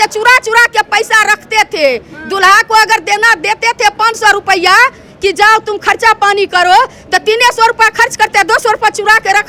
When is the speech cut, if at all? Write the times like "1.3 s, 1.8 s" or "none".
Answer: none